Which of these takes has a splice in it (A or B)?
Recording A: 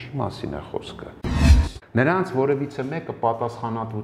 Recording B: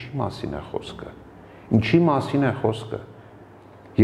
A